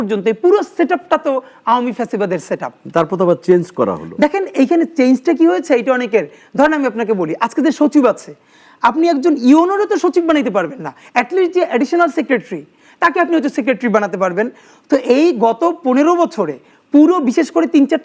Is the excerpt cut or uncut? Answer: uncut